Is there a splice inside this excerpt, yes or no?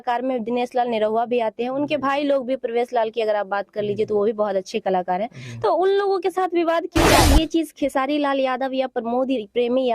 yes